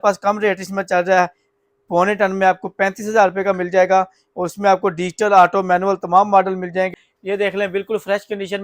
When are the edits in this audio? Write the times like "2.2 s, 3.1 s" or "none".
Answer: 6.9 s